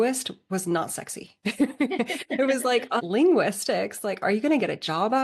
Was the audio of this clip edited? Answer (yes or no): yes